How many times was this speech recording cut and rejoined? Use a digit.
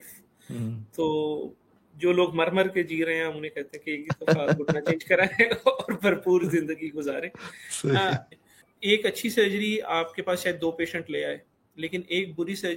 1